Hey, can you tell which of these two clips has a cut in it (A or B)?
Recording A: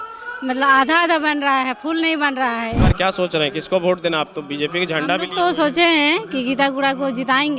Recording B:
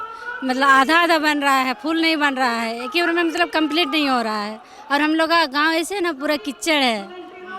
A